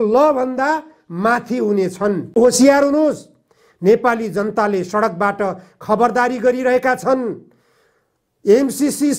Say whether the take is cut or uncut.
cut